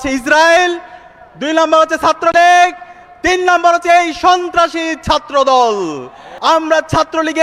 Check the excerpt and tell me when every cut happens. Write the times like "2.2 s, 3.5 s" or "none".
6.3 s